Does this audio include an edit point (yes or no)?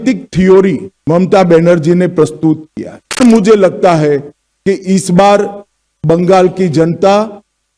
yes